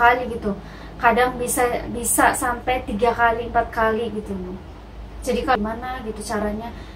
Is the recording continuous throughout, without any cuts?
no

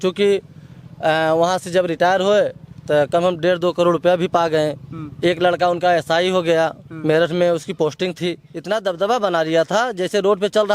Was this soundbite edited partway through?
yes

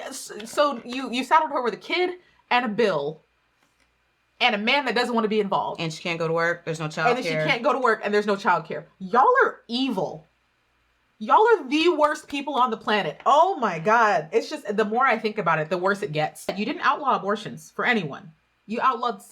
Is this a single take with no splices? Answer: no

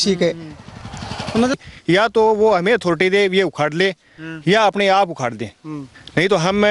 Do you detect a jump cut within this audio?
yes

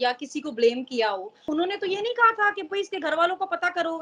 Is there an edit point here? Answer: yes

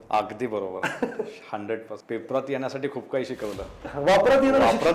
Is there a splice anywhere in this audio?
yes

